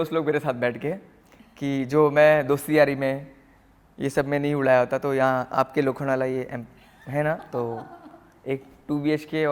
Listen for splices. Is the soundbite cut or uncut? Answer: uncut